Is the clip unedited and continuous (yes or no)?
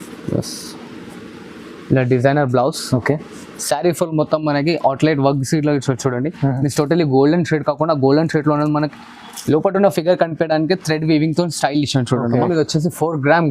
no